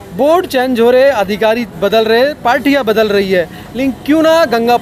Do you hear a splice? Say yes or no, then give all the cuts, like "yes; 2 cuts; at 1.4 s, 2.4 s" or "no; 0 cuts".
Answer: no; 0 cuts